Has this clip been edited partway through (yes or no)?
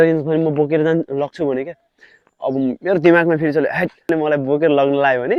no